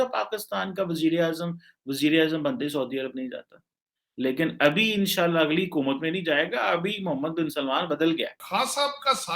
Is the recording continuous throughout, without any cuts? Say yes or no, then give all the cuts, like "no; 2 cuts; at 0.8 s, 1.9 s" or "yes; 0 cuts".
no; 1 cut; at 8.4 s